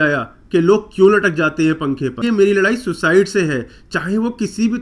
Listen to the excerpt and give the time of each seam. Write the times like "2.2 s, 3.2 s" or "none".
2.2 s